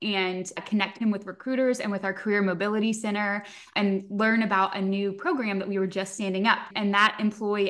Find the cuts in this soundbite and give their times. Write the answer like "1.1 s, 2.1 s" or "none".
6.7 s